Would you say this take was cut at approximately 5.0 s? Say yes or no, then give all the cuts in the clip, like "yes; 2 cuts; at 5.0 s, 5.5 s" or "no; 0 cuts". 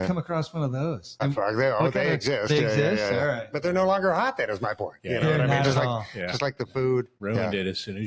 no; 2 cuts; at 1.2 s, 7.1 s